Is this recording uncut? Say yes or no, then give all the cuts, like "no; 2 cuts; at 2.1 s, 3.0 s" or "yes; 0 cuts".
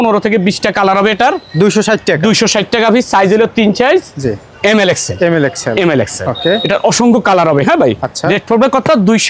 yes; 0 cuts